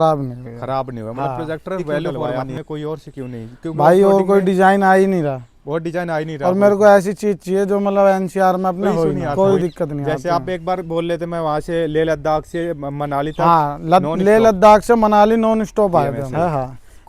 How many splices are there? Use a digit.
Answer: 3